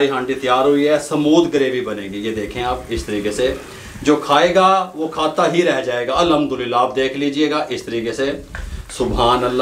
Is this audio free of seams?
yes; 0 cuts

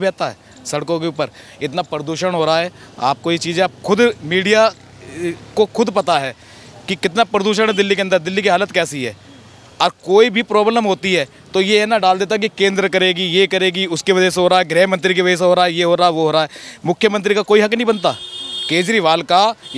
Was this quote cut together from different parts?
no; 0 cuts

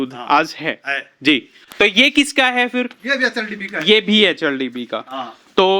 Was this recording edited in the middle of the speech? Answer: yes; 1 cut; at 1.6 s

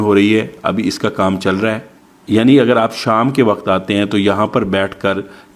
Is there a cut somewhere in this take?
yes; 1 cut; at 2.1 s

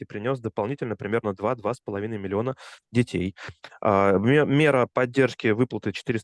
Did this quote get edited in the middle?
no; 0 cuts

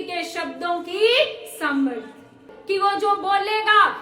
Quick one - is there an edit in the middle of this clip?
yes; 1 cut; at 2.5 s

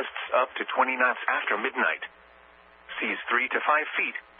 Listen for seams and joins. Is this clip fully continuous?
no; 1 cut; at 0.9 s

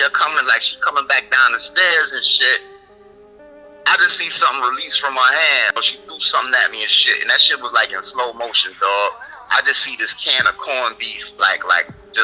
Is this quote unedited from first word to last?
no; 1 cut; at 5.8 s

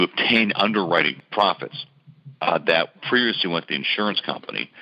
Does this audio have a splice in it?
yes; 1 cut; at 1.2 s

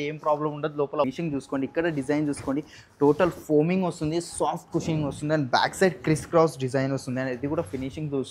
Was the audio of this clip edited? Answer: yes; 1 cut; at 1.0 s

